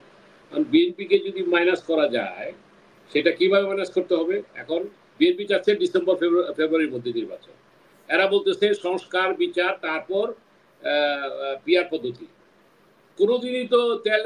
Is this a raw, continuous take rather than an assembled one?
yes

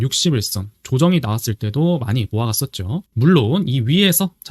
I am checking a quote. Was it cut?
yes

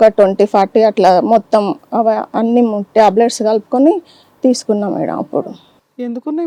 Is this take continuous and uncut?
yes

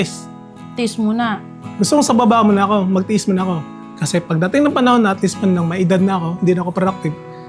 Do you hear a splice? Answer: no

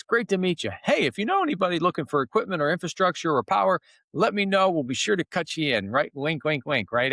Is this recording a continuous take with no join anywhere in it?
yes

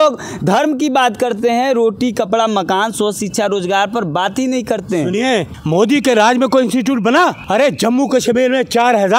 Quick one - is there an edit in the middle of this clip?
yes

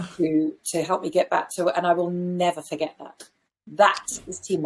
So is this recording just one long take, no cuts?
yes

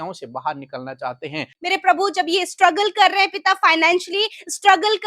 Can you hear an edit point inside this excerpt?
yes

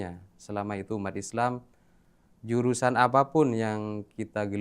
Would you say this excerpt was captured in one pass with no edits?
yes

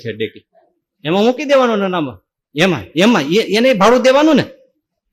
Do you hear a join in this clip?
no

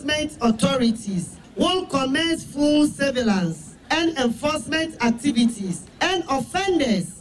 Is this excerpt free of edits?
no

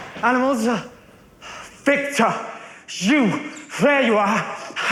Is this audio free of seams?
yes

